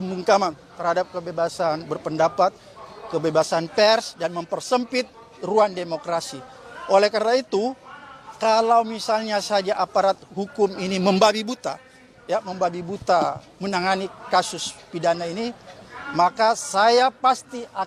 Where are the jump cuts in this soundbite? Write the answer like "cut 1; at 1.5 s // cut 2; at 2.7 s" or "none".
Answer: none